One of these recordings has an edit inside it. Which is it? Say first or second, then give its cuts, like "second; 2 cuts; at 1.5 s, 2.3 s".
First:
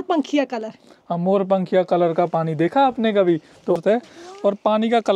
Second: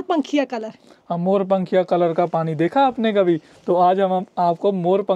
first; 1 cut; at 3.8 s